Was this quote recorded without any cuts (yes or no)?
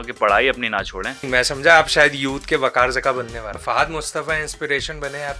no